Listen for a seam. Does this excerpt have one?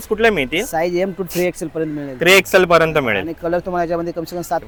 no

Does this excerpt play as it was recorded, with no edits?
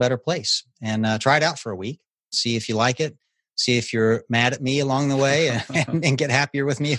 no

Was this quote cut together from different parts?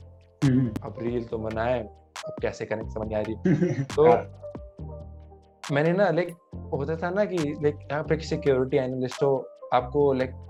no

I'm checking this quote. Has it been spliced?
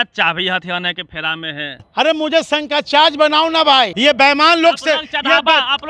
yes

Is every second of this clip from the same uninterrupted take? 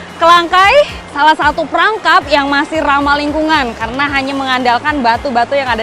no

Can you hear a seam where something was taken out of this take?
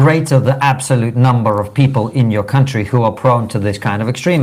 no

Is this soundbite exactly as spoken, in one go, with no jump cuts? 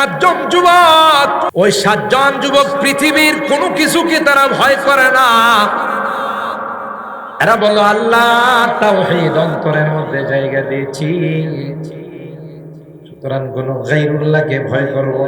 no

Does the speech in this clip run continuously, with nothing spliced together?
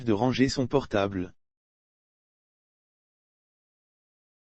yes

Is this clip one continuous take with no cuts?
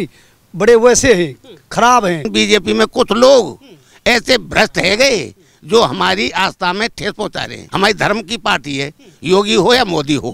no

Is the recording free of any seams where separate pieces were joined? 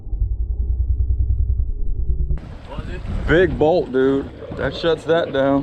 no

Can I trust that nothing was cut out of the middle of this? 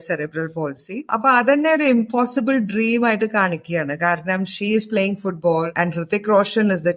no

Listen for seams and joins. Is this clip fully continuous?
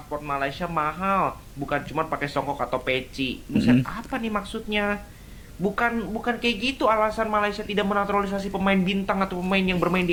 yes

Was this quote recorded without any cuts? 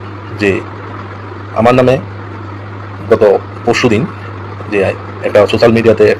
yes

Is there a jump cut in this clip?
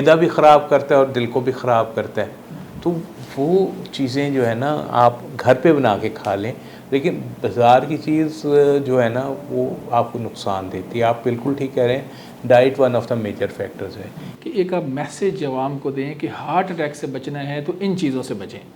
no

